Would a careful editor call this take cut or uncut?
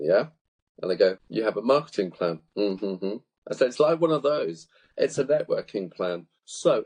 uncut